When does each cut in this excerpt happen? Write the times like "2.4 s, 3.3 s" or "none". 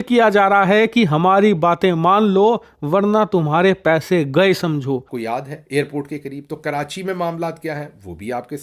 5.1 s